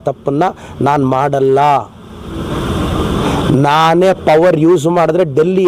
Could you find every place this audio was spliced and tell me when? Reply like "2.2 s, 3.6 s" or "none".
none